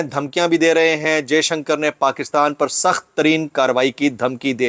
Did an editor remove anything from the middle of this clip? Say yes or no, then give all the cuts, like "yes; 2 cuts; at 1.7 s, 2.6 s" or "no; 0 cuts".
no; 0 cuts